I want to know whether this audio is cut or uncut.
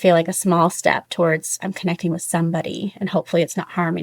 uncut